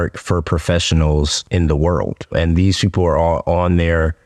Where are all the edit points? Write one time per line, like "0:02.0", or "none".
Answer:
0:01.4
0:02.3